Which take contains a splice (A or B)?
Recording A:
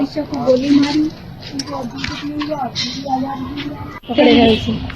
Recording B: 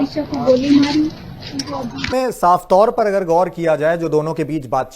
B